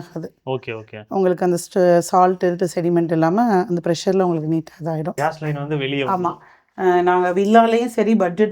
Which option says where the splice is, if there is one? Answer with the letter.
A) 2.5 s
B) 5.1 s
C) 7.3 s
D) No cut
B